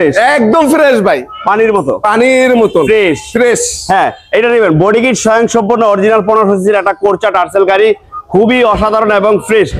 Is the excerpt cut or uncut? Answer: uncut